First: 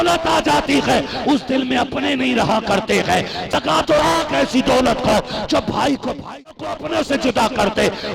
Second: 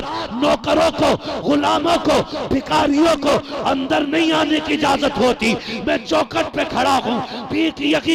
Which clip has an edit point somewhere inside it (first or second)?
first